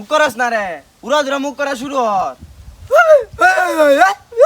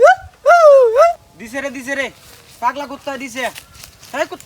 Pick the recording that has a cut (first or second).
second